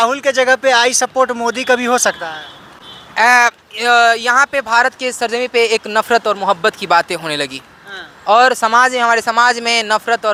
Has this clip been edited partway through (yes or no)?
no